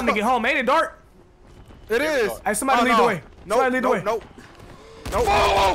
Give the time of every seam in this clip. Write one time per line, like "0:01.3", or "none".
none